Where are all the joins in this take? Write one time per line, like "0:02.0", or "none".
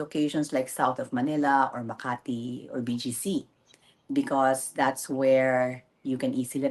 none

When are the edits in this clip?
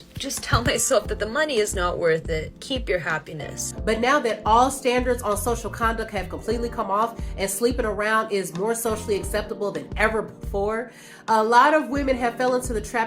0:03.6

